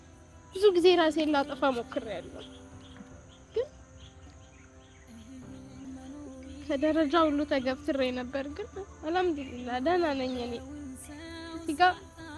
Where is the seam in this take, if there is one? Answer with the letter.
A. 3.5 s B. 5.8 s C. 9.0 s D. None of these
B